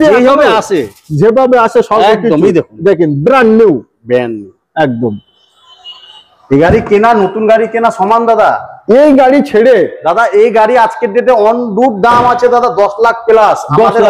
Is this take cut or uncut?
uncut